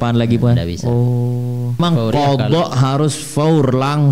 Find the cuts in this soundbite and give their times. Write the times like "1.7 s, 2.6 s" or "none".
1.8 s